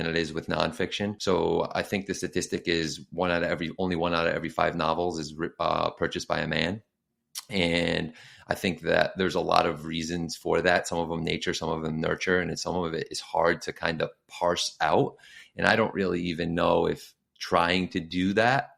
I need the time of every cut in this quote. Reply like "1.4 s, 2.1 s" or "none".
1.2 s